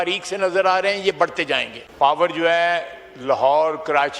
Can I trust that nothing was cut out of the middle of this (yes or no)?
no